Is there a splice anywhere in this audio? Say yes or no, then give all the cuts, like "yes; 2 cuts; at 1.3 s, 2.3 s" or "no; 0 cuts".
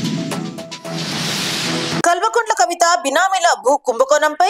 no; 0 cuts